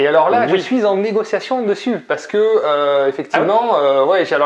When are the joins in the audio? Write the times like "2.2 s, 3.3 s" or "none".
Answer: none

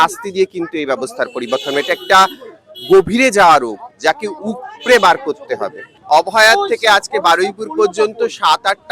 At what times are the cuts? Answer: none

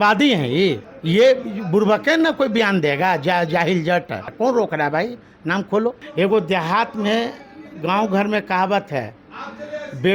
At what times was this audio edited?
0.9 s, 4.3 s, 6.0 s

